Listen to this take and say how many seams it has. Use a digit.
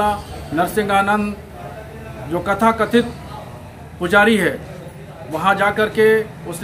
0